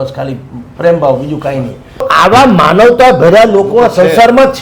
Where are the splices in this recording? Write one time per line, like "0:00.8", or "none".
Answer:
0:02.1